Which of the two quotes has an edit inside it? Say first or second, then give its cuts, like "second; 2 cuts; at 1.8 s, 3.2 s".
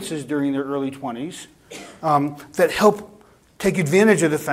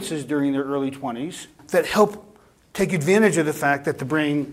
second; 1 cut; at 1.6 s